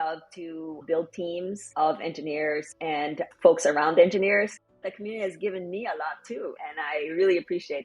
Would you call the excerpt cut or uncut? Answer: cut